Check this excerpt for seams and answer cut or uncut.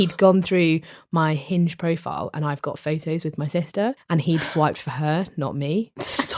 cut